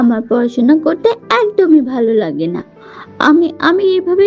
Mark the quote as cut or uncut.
uncut